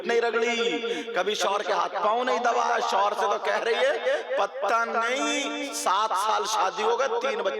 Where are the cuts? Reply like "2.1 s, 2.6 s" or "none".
none